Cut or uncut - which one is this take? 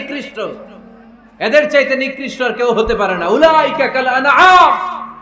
uncut